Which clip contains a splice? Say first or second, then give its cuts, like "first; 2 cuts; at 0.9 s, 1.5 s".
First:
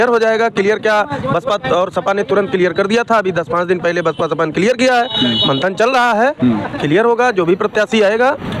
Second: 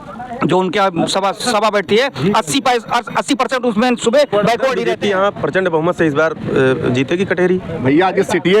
second; 1 cut; at 4.9 s